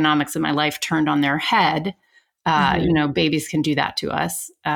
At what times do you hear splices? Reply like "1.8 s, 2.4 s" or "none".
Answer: none

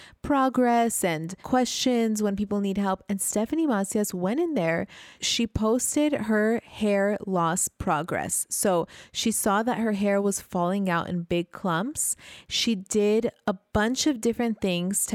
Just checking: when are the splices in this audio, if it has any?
5.2 s

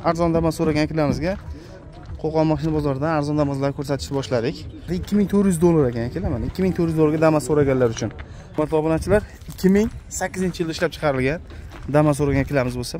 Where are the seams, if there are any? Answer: 4.9 s, 8.6 s

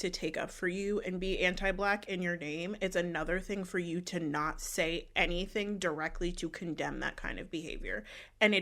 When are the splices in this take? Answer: none

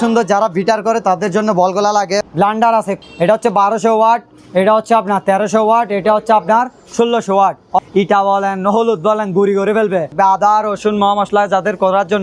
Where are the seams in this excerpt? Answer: 2.7 s, 7.8 s, 10.1 s

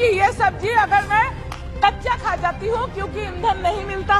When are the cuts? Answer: none

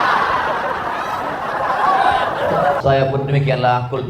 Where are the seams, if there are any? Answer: 2.8 s

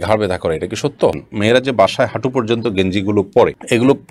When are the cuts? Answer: 1.3 s

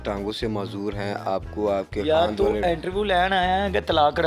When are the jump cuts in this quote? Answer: none

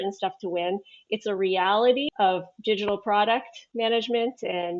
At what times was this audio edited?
2.1 s

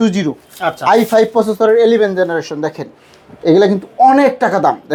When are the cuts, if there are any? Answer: none

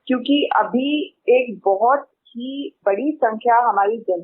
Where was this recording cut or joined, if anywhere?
2.7 s

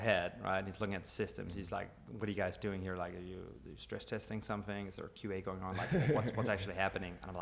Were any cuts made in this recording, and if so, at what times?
none

